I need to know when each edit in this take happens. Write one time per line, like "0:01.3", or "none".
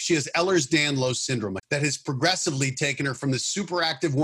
0:01.6